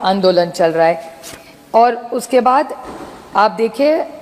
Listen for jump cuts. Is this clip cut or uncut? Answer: uncut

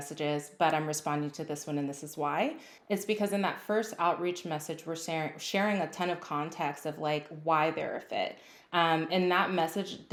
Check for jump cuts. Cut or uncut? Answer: uncut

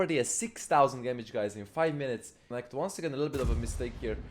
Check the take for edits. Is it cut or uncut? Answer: cut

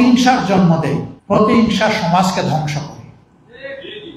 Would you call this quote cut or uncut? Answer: cut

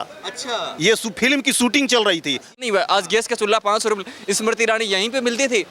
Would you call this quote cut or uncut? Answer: cut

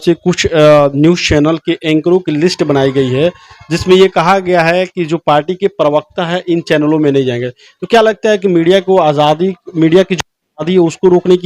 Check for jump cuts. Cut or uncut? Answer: uncut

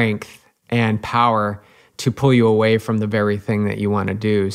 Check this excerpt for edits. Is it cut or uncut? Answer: uncut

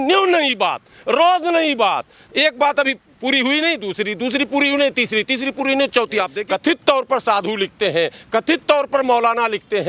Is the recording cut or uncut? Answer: cut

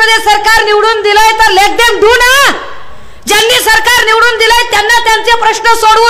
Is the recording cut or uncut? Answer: uncut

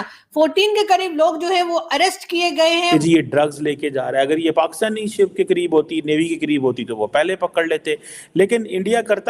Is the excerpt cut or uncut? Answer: cut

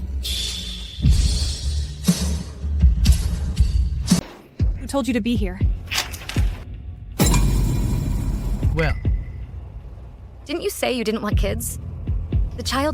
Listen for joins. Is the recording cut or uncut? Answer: cut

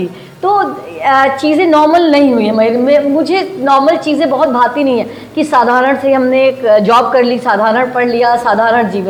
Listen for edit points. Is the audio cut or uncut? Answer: uncut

